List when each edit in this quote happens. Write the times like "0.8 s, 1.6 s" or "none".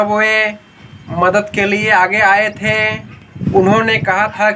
3.4 s